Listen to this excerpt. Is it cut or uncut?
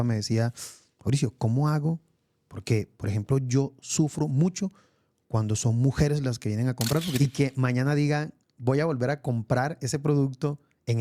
cut